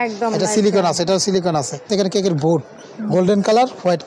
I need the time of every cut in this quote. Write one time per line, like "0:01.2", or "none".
0:01.9